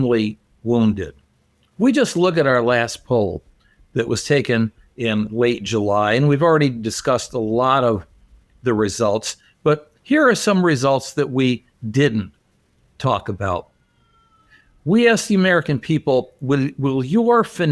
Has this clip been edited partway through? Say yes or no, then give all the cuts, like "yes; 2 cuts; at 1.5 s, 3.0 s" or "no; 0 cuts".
no; 0 cuts